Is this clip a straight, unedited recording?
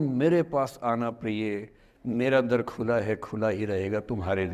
yes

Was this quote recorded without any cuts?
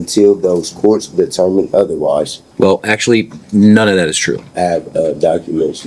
no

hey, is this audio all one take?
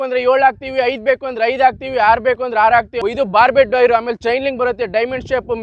no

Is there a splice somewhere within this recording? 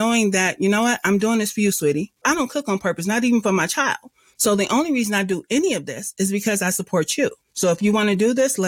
yes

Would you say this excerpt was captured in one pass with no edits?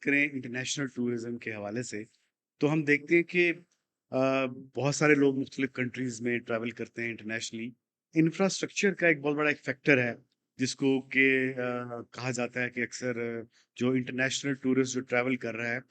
yes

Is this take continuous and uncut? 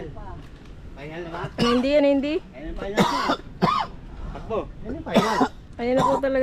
yes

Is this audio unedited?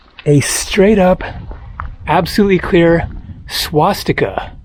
yes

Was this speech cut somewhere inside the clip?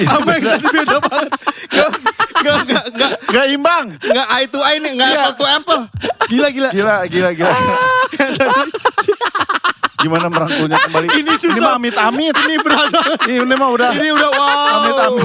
no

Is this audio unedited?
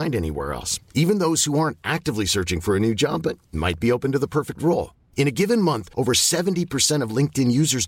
yes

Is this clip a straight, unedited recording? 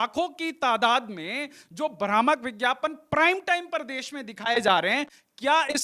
yes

